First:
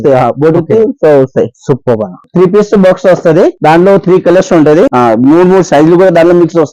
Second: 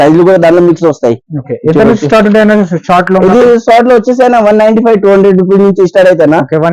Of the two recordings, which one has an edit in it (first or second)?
first